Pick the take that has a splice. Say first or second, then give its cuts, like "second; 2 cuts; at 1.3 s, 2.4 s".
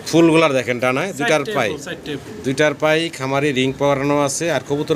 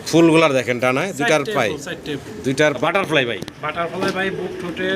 second; 1 cut; at 2.8 s